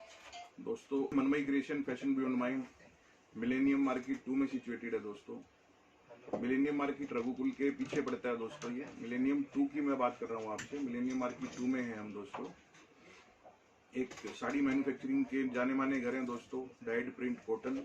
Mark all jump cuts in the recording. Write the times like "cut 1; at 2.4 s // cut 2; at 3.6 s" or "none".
cut 1; at 1.1 s